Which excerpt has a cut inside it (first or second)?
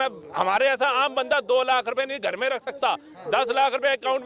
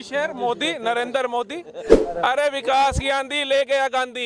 second